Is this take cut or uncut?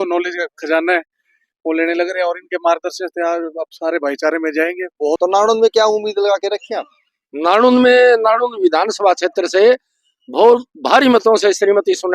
cut